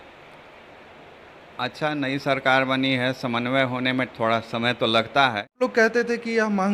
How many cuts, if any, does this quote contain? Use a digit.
1